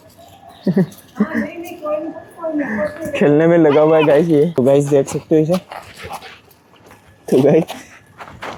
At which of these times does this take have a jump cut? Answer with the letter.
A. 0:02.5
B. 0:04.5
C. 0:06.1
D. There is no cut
D